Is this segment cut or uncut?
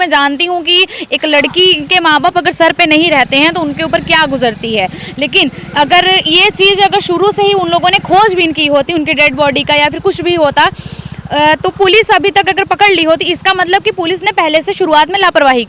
uncut